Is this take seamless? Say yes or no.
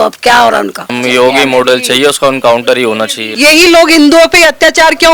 no